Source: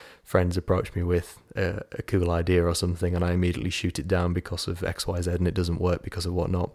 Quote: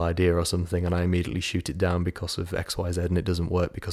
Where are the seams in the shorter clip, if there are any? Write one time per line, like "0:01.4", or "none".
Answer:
none

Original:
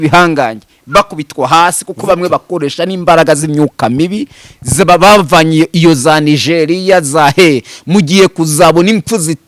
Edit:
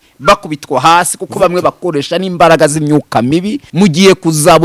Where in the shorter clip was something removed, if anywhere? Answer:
0:03.6

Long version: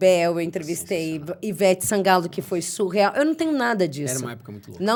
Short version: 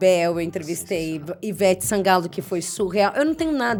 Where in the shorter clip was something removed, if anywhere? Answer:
none

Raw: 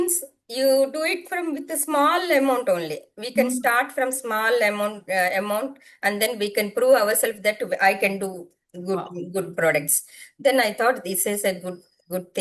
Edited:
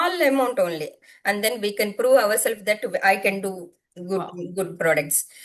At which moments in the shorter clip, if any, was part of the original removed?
0:01.0

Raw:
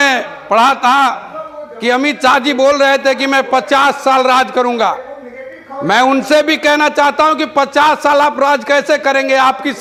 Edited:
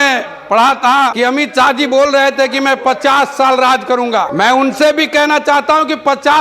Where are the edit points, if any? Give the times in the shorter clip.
0:01.1
0:04.3

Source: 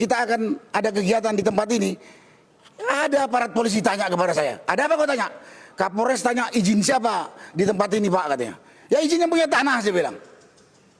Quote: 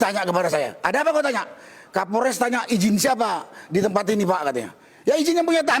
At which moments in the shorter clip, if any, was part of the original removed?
none

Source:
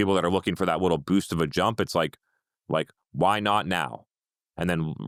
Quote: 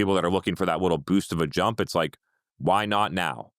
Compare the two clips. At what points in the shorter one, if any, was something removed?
0:02.5

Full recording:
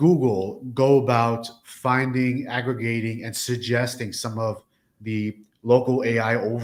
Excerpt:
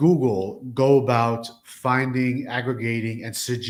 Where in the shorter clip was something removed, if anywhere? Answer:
none

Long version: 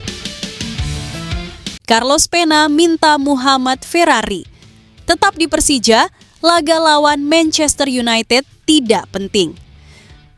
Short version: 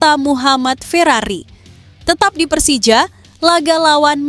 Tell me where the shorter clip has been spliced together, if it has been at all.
none

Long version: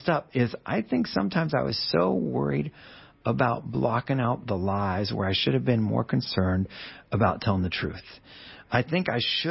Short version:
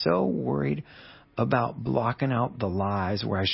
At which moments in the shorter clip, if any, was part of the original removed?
none

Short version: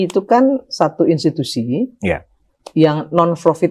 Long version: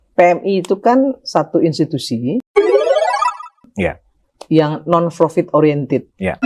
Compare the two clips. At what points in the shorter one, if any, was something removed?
0:01.9

